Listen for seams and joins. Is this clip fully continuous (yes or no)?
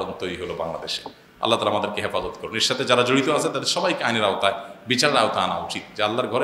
yes